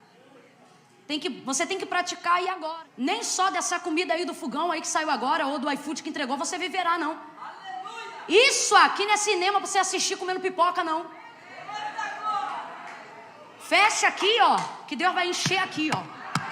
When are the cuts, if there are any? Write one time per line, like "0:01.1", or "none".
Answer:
0:02.6